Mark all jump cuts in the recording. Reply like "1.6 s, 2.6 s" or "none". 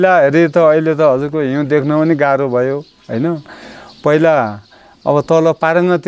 none